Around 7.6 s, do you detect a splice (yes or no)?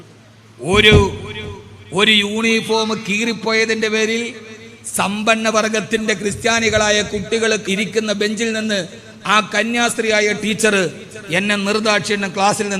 yes